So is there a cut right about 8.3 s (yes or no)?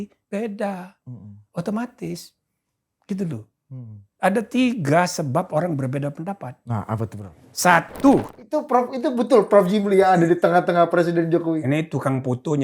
yes